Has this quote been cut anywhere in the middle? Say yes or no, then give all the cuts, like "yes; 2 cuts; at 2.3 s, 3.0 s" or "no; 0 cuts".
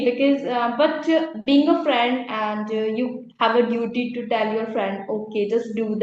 no; 0 cuts